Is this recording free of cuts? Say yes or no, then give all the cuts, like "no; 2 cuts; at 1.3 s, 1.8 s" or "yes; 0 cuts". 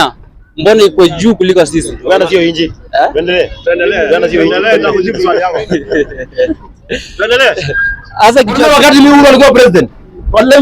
no; 1 cut; at 8.6 s